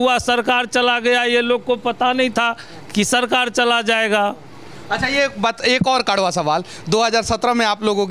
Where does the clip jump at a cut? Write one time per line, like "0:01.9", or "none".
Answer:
none